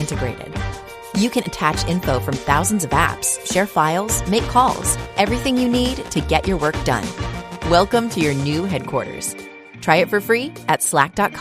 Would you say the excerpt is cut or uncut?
uncut